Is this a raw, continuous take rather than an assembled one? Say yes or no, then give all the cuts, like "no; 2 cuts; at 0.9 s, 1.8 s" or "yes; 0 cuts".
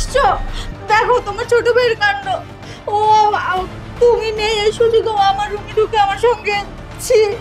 yes; 0 cuts